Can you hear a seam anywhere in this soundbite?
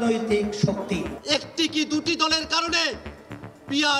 yes; 1 cut; at 1.1 s

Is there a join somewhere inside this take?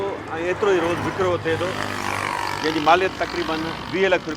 no; 0 cuts

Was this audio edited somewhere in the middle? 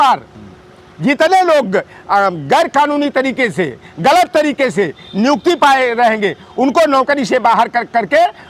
no; 0 cuts

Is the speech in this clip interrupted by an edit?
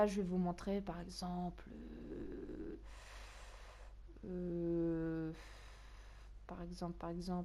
no; 0 cuts

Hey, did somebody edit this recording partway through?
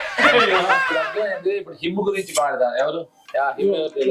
yes; 2 cuts; at 1.0 s, 3.2 s

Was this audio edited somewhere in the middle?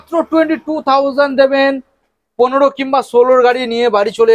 no; 0 cuts

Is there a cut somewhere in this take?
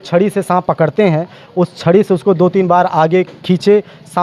no; 0 cuts

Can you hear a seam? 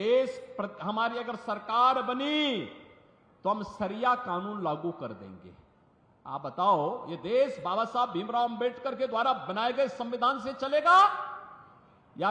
no; 0 cuts

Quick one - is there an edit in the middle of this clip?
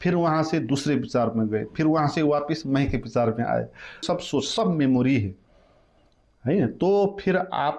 yes; 1 cut; at 4.0 s

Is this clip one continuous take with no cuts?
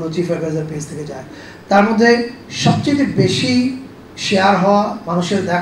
yes; 0 cuts

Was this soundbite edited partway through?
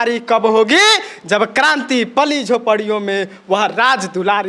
no; 0 cuts

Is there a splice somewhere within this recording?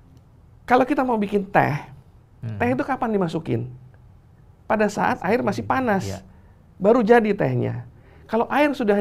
no; 0 cuts

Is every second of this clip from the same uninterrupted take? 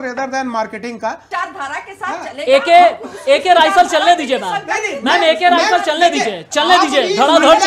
no; 1 cut; at 1.2 s

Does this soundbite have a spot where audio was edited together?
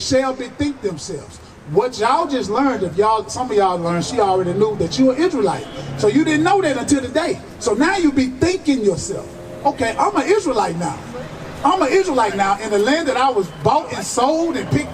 no; 0 cuts

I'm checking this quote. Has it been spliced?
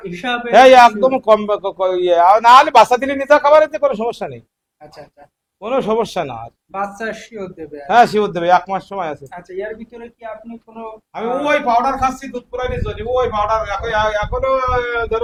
no; 0 cuts

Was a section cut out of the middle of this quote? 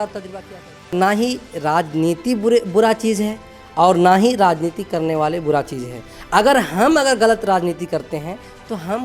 yes; 1 cut; at 0.9 s

